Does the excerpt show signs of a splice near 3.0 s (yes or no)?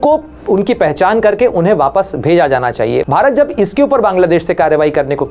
yes